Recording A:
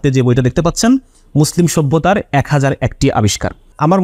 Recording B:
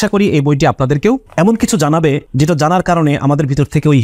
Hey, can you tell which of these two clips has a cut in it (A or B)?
B